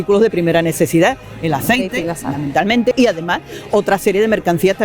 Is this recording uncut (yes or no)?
no